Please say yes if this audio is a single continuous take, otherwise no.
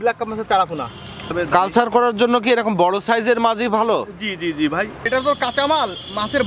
no